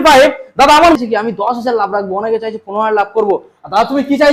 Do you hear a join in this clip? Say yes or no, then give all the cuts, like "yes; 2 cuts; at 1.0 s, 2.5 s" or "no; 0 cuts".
yes; 1 cut; at 1.0 s